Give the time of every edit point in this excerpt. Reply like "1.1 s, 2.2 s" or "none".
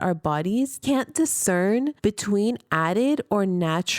0.8 s, 1.9 s